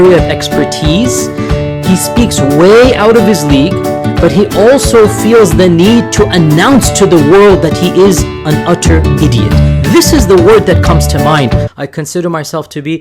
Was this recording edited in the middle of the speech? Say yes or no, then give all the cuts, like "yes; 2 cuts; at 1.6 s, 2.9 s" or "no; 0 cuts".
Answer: yes; 1 cut; at 11.7 s